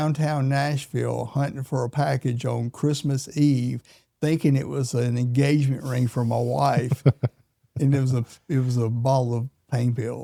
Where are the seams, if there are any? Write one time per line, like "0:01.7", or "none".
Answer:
none